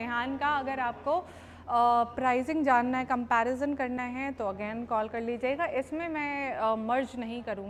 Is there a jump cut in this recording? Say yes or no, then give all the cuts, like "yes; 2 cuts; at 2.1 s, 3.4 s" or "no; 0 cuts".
no; 0 cuts